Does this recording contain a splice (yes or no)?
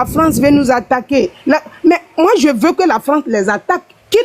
no